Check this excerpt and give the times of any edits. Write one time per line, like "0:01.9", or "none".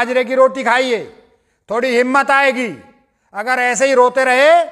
none